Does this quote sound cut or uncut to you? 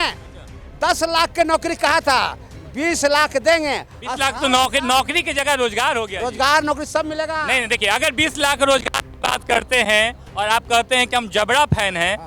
uncut